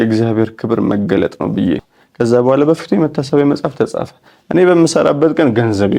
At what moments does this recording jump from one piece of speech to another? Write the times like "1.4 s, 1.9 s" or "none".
2.0 s